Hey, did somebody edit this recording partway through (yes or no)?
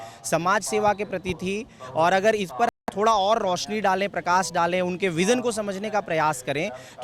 no